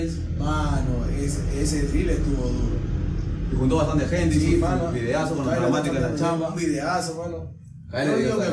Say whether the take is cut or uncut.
uncut